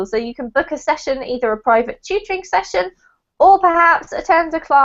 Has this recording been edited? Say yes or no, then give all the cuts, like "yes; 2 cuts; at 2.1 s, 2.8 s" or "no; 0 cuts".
yes; 1 cut; at 2.4 s